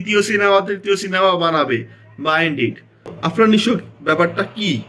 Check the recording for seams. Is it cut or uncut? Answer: cut